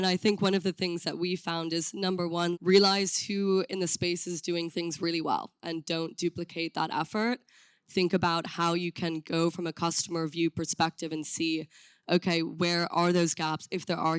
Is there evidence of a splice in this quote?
yes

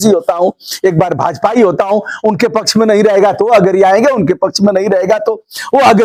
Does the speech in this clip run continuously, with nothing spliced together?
yes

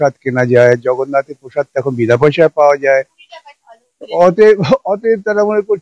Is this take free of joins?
yes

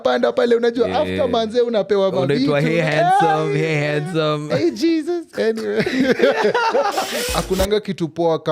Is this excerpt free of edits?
no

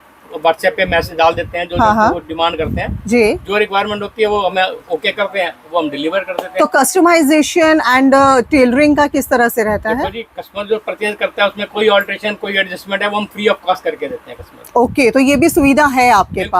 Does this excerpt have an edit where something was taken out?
no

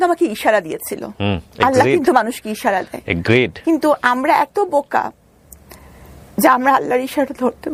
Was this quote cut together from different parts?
no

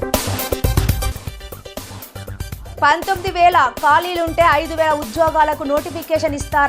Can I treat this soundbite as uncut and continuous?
no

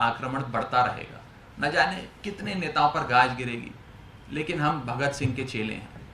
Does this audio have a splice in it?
no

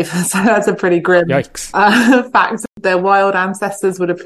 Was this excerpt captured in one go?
no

